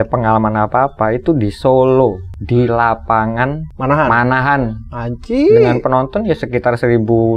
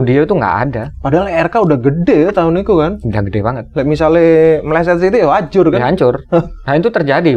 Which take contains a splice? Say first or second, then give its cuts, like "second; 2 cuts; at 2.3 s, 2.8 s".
first; 2 cuts; at 2.3 s, 3.7 s